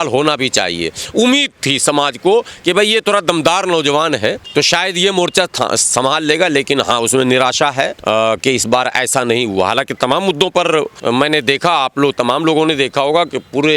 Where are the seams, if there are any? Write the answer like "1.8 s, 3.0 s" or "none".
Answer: 4.4 s, 8.0 s, 10.9 s